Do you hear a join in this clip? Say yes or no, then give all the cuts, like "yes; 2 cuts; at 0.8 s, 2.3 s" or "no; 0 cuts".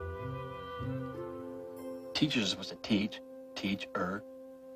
no; 0 cuts